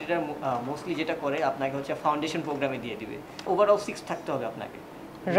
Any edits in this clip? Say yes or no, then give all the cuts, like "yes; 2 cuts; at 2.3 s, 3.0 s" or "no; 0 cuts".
yes; 1 cut; at 3.4 s